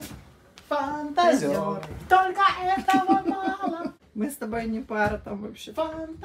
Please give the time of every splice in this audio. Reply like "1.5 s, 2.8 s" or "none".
4.0 s